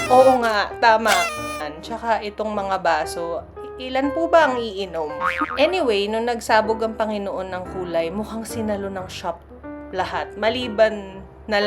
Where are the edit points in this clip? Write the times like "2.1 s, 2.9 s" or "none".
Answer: 1.7 s, 5.4 s